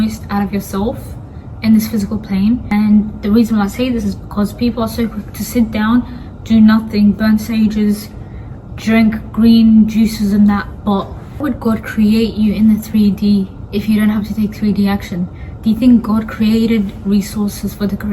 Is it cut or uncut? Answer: uncut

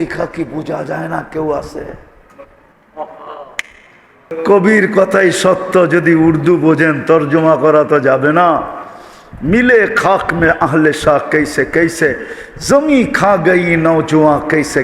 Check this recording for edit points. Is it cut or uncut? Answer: cut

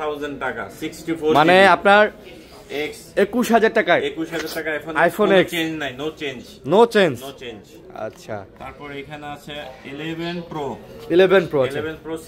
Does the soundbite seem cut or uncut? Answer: uncut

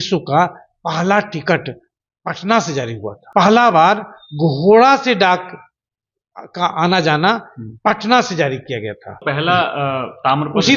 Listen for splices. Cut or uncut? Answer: cut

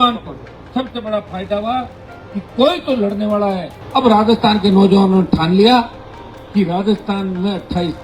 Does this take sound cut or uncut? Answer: cut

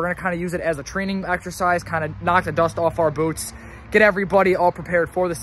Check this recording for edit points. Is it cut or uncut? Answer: uncut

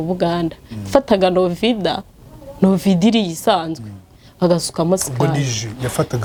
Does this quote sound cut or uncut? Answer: uncut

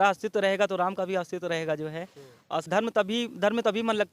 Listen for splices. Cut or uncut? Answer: cut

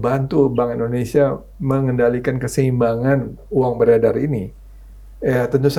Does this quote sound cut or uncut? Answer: uncut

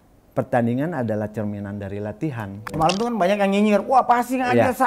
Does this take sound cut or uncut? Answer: cut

